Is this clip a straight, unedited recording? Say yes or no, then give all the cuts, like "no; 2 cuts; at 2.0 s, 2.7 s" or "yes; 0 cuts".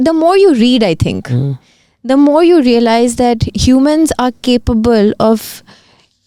yes; 0 cuts